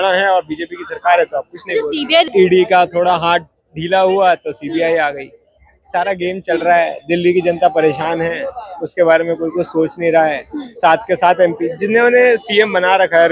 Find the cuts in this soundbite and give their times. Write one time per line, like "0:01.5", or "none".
0:02.3

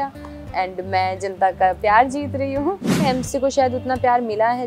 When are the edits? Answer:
0:03.0

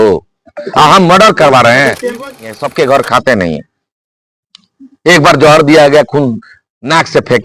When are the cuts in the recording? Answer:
0:02.4

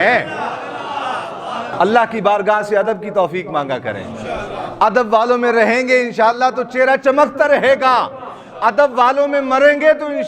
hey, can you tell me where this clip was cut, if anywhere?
0:01.7

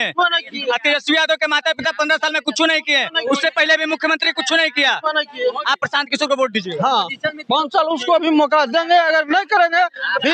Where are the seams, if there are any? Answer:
none

